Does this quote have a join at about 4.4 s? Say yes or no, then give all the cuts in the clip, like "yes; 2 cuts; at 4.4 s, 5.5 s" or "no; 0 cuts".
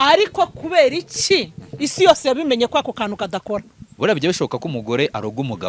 no; 0 cuts